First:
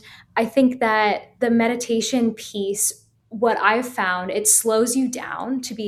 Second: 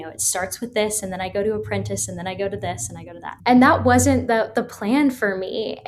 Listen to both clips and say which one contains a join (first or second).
second